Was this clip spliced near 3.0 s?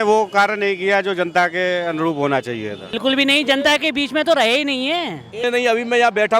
yes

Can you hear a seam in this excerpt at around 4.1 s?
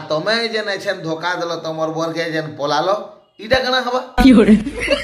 yes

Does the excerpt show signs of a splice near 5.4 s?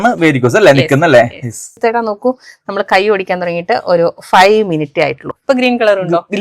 yes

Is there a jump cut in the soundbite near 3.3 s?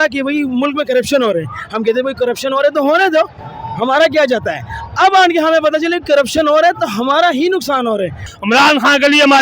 no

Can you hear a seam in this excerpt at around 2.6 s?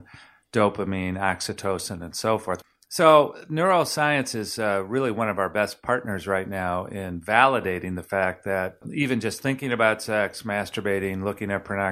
yes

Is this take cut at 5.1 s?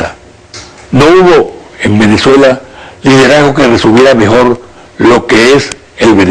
no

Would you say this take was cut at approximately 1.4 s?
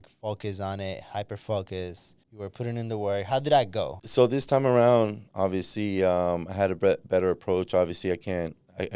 no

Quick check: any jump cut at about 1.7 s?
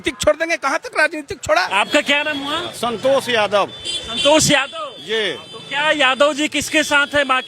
yes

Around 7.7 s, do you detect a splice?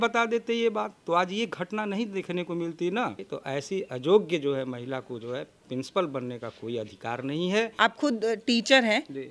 yes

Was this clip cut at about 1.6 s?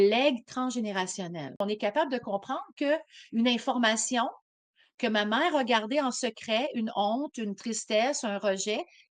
yes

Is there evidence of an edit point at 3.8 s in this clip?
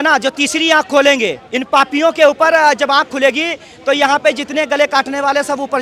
no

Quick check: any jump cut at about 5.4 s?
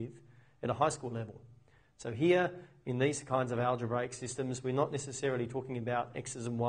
yes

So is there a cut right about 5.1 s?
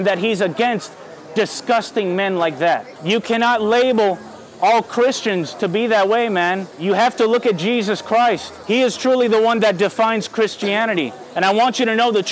no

